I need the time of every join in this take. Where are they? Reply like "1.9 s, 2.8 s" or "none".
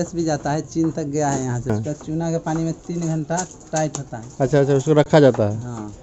1.6 s

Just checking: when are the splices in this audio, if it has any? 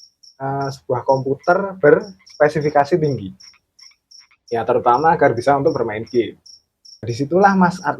7.1 s

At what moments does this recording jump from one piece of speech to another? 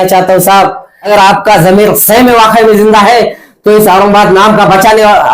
0.9 s

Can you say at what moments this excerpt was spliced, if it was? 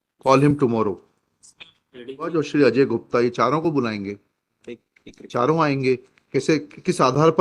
2.3 s

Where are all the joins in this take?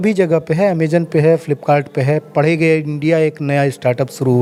none

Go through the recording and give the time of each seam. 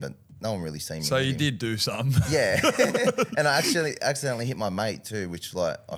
none

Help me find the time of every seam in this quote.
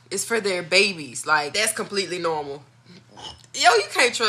1.5 s

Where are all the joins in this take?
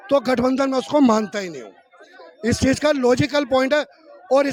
none

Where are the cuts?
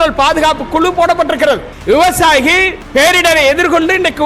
1.7 s, 2.8 s

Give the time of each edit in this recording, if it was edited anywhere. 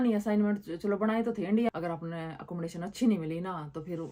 1.7 s

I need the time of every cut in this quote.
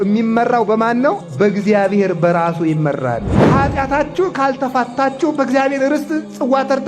1.2 s, 3.3 s

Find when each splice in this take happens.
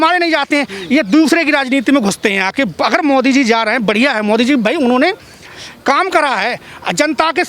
none

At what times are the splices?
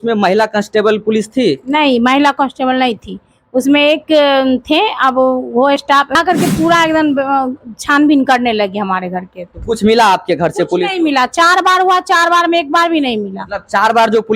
6.2 s

